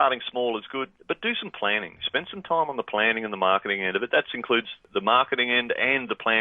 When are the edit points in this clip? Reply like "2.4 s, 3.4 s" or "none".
0.9 s, 4.9 s